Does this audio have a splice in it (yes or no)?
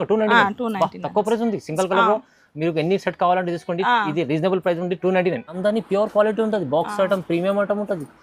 yes